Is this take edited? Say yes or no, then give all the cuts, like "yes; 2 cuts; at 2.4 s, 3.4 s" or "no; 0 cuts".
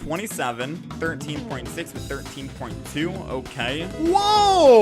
yes; 1 cut; at 3.9 s